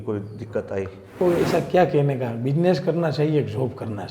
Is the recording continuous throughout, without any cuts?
no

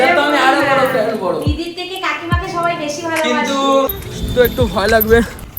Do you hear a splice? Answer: yes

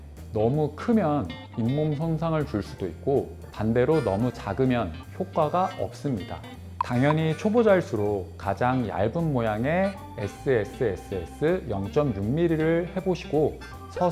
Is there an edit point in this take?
yes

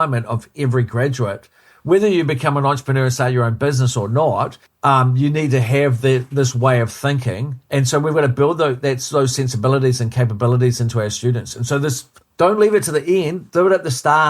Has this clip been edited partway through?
yes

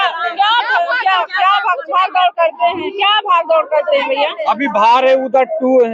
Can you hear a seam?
no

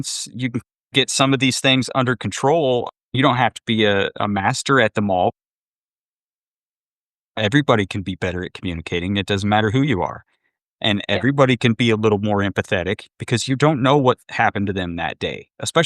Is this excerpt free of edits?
yes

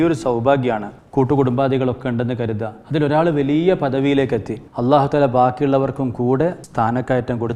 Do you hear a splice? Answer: no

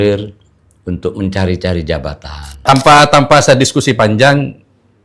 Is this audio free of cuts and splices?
no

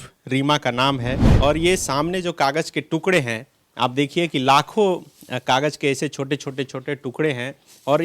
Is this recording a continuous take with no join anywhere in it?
no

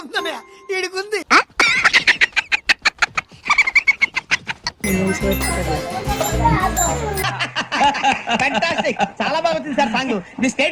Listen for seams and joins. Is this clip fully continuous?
no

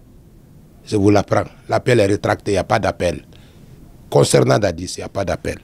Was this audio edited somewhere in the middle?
no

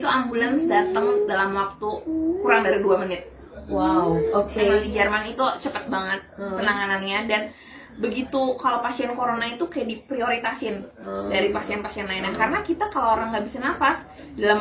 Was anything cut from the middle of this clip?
no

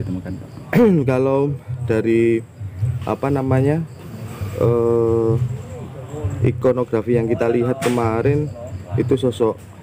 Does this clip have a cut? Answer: no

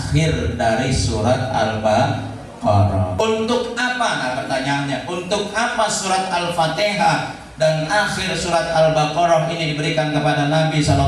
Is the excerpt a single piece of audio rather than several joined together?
no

